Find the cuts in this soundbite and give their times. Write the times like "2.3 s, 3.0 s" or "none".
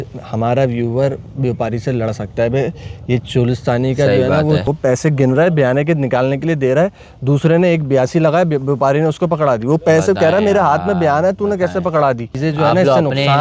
4.6 s, 12.3 s